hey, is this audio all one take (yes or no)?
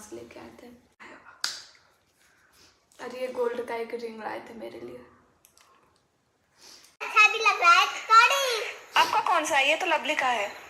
no